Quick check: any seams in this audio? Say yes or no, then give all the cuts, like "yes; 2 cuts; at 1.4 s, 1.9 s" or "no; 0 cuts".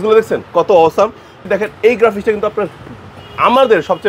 yes; 1 cut; at 1.3 s